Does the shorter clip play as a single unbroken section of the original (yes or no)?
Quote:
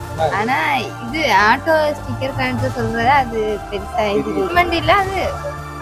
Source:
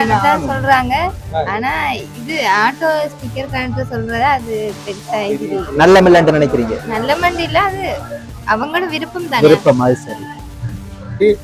no